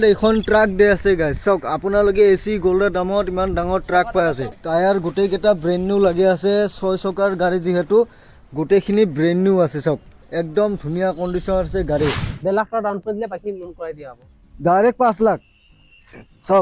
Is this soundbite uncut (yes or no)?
no